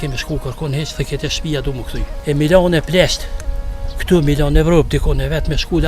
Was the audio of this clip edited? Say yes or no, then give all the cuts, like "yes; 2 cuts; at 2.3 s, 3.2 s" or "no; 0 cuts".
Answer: yes; 1 cut; at 2.1 s